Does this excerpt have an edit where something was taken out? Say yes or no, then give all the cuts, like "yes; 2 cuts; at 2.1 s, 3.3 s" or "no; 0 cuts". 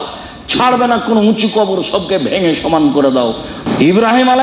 yes; 1 cut; at 3.5 s